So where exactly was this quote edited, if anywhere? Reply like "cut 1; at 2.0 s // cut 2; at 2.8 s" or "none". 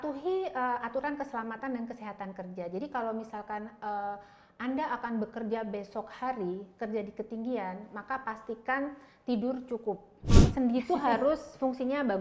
cut 1; at 10.3 s